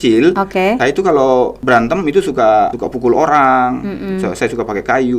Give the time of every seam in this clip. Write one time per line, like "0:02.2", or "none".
0:00.8
0:01.6
0:02.8